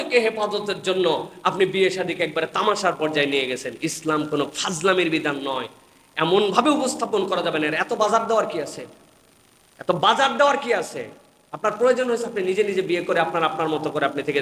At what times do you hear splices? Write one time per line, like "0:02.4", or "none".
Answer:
none